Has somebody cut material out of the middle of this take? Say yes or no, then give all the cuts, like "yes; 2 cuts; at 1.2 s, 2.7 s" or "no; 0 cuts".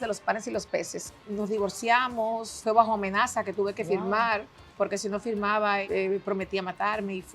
yes; 4 cuts; at 1.0 s, 2.6 s, 4.6 s, 5.8 s